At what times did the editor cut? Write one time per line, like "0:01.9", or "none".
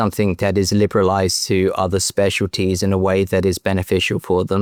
none